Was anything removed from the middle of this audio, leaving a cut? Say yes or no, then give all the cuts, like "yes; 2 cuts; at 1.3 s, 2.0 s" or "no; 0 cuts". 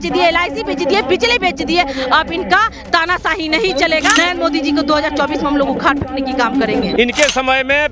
yes; 2 cuts; at 4.1 s, 6.9 s